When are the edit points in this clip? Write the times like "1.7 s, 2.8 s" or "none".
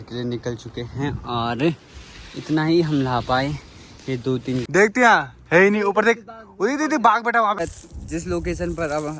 4.6 s, 7.6 s